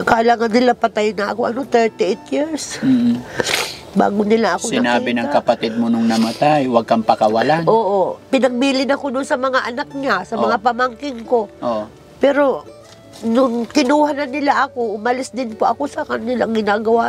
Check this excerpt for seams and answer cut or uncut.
uncut